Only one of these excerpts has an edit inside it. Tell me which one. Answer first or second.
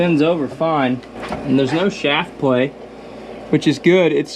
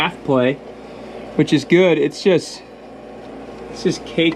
first